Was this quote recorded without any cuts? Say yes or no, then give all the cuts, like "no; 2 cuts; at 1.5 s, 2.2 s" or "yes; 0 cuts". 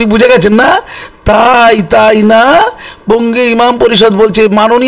yes; 0 cuts